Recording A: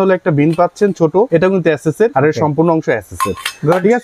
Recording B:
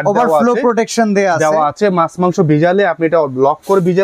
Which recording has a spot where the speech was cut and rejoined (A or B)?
A